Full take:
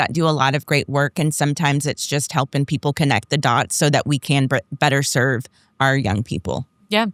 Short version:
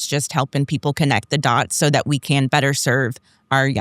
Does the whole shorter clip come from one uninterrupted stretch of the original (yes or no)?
no